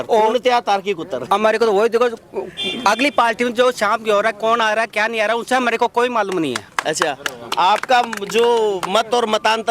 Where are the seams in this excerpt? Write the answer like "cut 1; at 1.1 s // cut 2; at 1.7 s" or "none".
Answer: none